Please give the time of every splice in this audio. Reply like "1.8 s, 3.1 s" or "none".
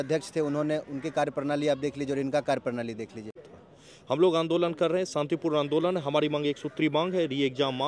3.4 s